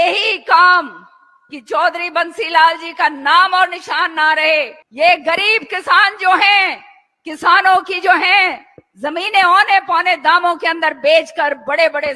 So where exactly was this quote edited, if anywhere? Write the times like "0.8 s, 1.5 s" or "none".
4.8 s